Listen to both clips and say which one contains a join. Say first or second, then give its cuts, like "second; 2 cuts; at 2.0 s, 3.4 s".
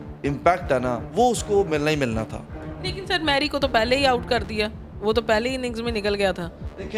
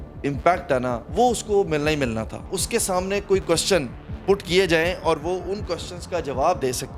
second; 1 cut; at 2.5 s